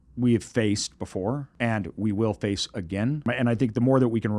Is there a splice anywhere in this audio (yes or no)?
yes